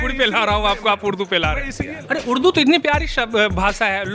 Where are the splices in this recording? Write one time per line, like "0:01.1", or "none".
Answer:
0:01.8